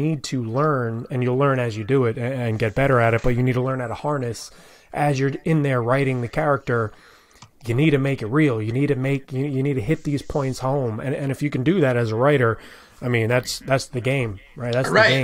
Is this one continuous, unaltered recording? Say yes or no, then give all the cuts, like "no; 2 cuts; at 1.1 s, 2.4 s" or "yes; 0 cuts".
yes; 0 cuts